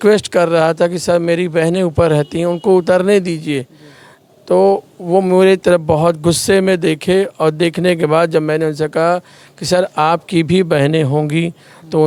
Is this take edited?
no; 0 cuts

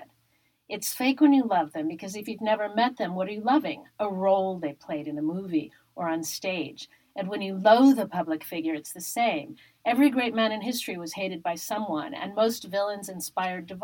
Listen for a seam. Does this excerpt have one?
no; 0 cuts

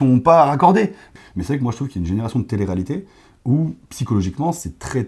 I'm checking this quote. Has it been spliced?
yes; 1 cut; at 1.0 s

